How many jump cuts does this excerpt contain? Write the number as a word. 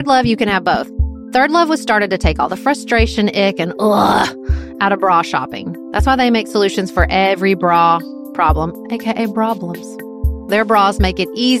zero